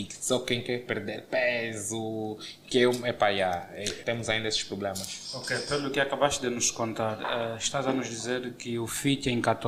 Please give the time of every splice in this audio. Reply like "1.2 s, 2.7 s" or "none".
none

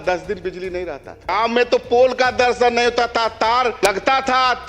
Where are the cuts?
1.3 s, 3.8 s

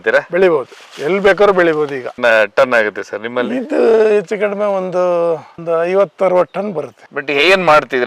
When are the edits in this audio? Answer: 2.1 s

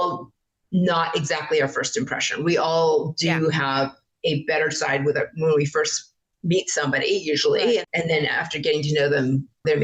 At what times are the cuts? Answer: 7.9 s

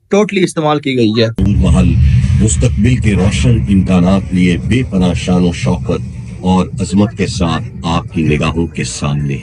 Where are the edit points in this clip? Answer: 1.4 s

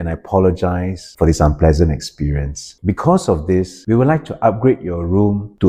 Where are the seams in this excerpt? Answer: none

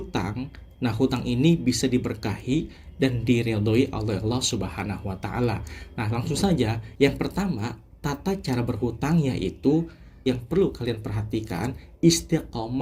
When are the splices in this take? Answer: 10.1 s

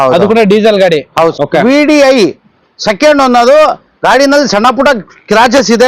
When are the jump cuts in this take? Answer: 1.4 s

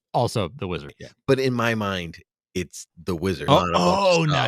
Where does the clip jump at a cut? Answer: 0.9 s, 3.5 s

